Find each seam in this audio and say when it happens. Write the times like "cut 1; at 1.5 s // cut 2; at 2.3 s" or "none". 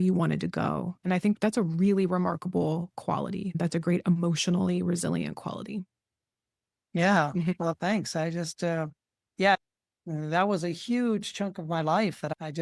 cut 1; at 3.5 s // cut 2; at 9.6 s